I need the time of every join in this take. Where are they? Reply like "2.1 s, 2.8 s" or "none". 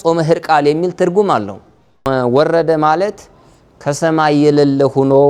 2.1 s